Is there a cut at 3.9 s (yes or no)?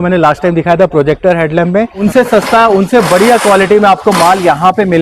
no